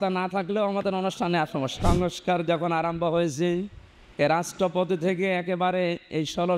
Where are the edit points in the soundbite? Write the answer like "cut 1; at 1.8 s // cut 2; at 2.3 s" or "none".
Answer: cut 1; at 1.8 s